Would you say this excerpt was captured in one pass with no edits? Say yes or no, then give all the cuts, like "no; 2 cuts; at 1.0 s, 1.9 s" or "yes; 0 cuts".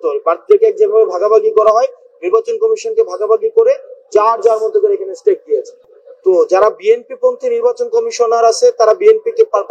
yes; 0 cuts